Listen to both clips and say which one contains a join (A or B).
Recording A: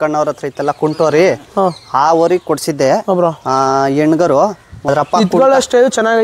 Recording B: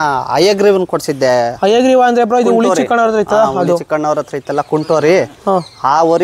A